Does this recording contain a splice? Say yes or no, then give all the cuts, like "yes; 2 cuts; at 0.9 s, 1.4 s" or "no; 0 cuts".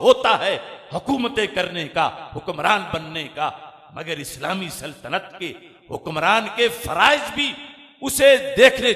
no; 0 cuts